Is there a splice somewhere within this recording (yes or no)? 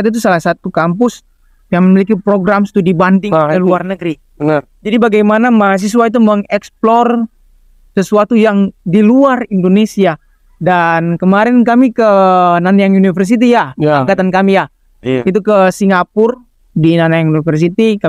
no